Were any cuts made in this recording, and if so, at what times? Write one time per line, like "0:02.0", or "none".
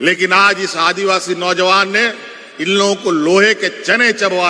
none